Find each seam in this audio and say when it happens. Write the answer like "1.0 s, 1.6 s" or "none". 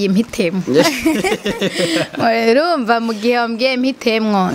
none